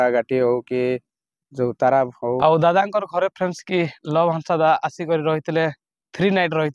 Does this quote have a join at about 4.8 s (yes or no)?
no